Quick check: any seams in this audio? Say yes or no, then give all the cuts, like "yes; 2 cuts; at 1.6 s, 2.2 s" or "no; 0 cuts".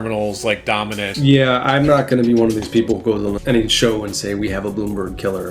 yes; 2 cuts; at 1.1 s, 3.4 s